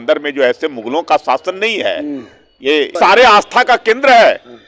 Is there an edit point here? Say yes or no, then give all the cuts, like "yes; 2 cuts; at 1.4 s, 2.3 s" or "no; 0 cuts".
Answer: yes; 1 cut; at 2.9 s